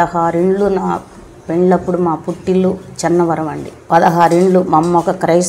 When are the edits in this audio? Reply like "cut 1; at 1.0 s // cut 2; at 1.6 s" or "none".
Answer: cut 1; at 3.7 s